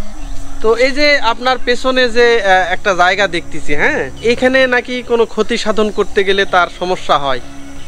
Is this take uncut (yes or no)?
no